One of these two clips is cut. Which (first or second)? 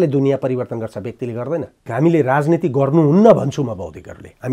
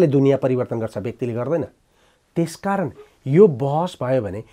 first